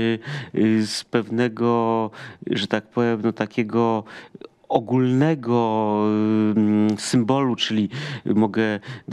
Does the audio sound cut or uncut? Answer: uncut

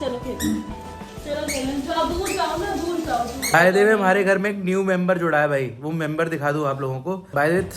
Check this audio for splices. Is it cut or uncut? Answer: cut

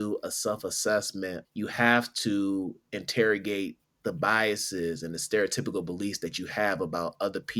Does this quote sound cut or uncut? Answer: cut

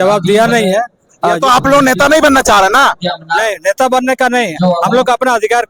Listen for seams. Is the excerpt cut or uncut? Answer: uncut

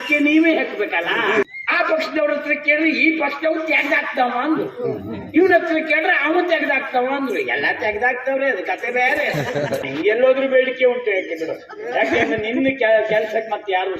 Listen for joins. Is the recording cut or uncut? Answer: cut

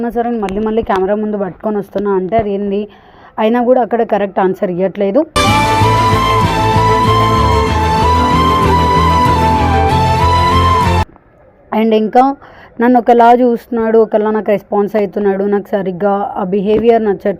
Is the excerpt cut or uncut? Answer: uncut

